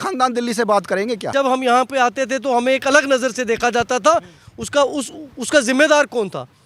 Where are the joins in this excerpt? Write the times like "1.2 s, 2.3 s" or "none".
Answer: 1.3 s